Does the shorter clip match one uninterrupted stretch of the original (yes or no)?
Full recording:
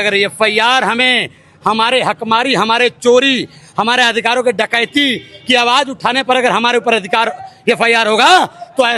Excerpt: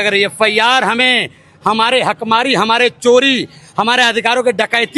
yes